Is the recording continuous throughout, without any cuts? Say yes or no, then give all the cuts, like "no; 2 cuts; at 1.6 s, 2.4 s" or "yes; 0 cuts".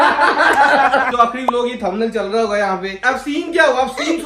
no; 2 cuts; at 1.1 s, 2.9 s